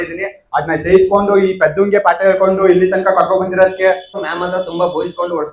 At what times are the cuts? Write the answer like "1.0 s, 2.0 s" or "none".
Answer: 4.2 s